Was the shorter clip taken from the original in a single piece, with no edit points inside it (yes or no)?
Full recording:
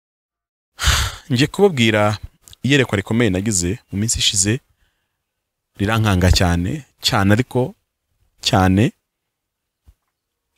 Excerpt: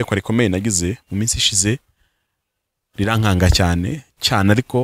yes